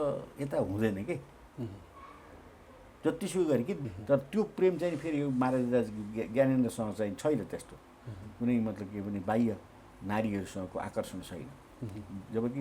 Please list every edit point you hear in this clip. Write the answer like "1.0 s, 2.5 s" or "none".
3.8 s